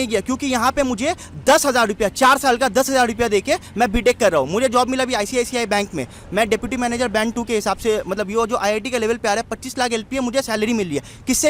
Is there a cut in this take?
no; 0 cuts

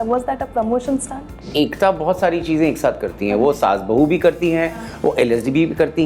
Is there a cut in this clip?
yes; 1 cut; at 1.4 s

